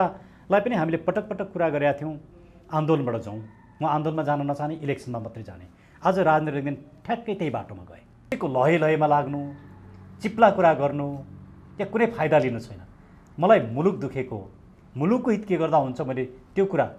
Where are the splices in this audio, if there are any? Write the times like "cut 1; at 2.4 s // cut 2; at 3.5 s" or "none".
cut 1; at 8.4 s